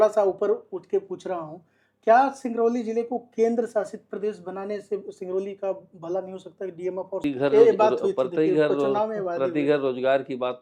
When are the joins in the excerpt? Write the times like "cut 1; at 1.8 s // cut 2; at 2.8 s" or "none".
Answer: cut 1; at 7.2 s